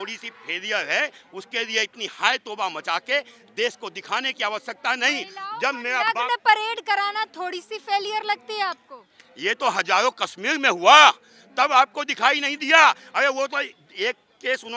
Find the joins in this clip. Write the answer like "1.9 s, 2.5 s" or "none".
none